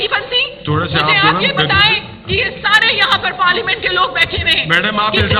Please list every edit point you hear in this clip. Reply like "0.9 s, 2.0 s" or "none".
none